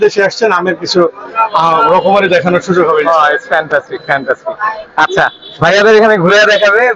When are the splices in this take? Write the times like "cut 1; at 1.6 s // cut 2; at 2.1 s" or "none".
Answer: none